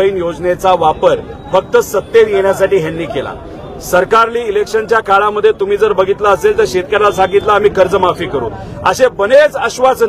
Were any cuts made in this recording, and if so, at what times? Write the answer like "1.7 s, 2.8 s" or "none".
none